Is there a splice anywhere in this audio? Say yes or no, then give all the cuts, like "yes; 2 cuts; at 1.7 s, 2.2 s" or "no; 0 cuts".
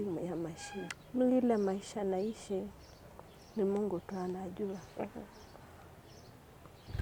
yes; 1 cut; at 0.9 s